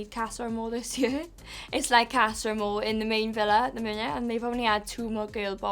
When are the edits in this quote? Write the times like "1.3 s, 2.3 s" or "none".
none

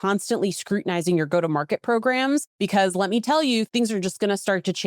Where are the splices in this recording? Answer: 2.5 s, 3.7 s

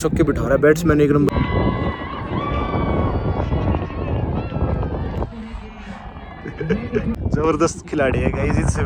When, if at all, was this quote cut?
none

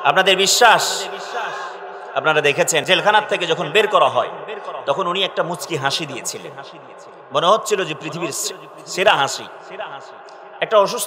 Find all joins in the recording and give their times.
2.8 s

